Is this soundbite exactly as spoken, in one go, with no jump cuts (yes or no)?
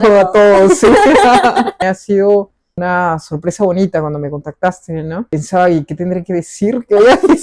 no